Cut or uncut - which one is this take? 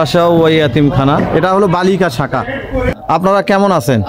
cut